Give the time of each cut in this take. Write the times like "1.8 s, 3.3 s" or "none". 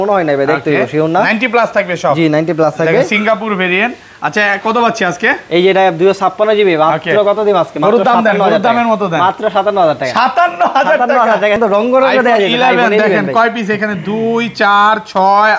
11.6 s